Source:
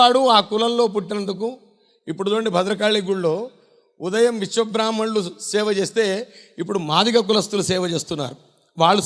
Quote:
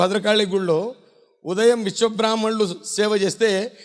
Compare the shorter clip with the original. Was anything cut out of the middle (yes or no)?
no